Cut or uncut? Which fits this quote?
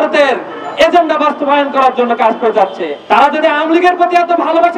cut